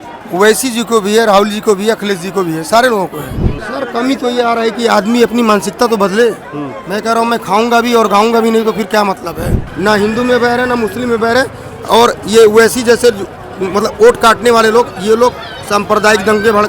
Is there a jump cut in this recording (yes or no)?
yes